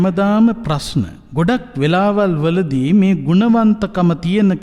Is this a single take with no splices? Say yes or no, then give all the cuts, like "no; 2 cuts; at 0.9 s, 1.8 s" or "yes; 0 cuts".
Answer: no; 1 cut; at 1.2 s